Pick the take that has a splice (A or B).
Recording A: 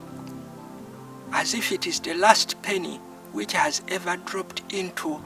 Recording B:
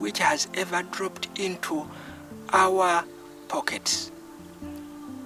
A